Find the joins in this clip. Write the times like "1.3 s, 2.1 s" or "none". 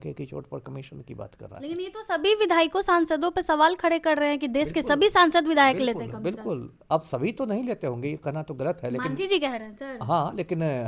none